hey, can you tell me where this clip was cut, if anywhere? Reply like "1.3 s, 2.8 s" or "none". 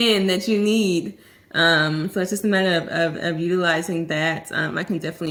none